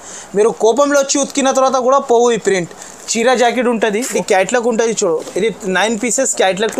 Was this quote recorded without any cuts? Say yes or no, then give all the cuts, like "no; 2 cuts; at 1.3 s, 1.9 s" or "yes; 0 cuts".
no; 1 cut; at 4.1 s